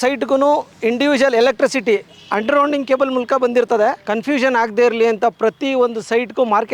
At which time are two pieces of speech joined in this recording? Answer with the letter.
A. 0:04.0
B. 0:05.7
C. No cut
A